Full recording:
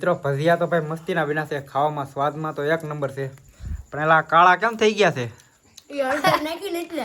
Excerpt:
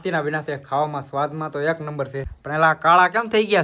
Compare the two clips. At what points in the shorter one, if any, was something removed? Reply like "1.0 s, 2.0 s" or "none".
2.4 s